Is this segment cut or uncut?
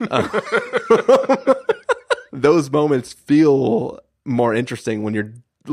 cut